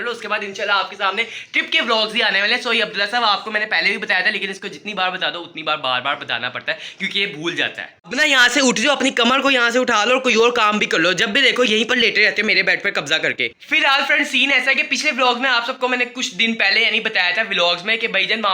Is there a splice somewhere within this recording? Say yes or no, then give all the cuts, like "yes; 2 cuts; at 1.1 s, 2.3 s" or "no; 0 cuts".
no; 0 cuts